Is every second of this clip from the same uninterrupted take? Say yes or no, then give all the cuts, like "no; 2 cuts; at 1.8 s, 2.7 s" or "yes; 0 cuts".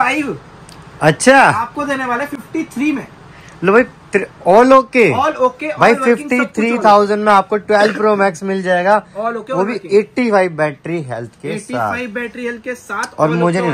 yes; 0 cuts